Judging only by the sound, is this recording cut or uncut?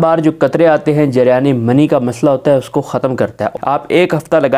cut